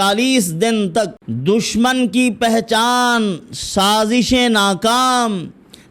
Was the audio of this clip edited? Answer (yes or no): yes